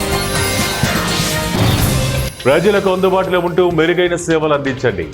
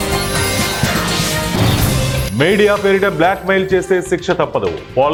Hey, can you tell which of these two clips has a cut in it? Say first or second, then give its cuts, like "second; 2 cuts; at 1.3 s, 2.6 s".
first; 1 cut; at 2.2 s